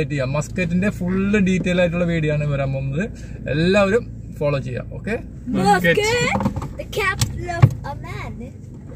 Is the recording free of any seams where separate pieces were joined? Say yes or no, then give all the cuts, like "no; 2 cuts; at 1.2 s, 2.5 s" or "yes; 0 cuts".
no; 1 cut; at 5.3 s